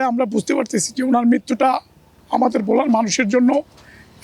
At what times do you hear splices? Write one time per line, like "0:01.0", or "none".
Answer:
none